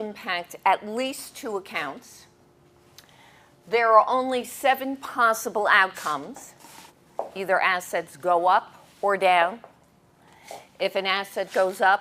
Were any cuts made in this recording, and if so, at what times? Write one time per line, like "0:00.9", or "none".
0:02.6

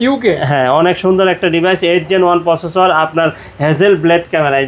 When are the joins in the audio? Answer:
none

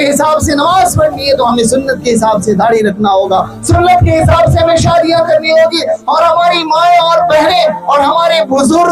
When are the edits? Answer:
none

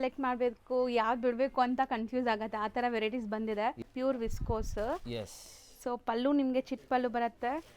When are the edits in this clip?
0:03.8

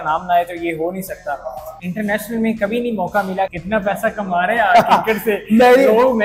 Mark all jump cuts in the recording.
0:01.7
0:03.5

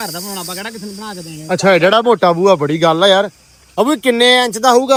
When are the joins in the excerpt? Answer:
none

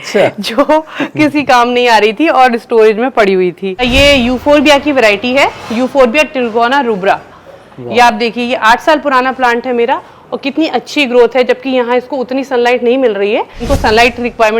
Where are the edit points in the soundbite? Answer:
0:03.9
0:13.6

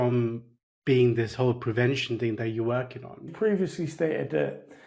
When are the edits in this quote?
0:03.3

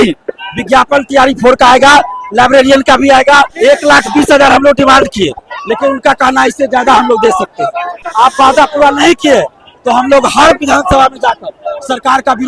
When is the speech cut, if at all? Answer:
0:03.5
0:08.0

